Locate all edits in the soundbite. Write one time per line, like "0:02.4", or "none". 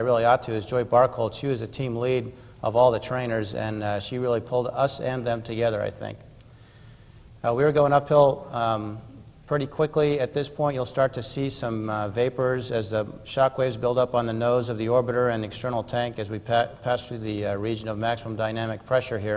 0:12.5